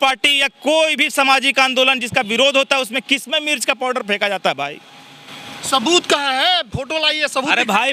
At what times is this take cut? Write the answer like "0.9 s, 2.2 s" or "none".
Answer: none